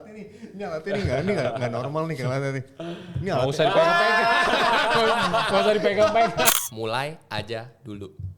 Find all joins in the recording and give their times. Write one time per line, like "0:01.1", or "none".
0:06.5